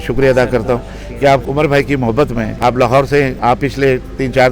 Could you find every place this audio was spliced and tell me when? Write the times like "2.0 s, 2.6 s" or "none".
1.4 s, 2.5 s, 3.3 s